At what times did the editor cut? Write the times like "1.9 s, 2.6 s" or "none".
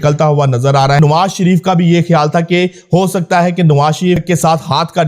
1.0 s, 4.2 s